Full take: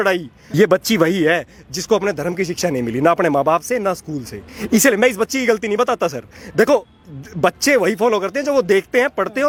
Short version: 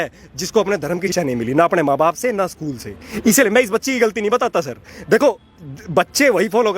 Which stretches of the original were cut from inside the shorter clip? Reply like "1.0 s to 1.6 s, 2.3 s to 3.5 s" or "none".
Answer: 2.5 s to 2.6 s